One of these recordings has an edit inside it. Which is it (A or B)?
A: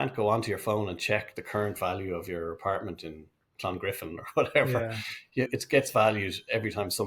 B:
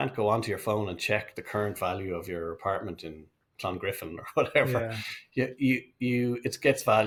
A